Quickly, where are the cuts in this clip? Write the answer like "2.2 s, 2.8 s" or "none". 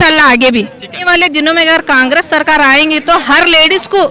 1.0 s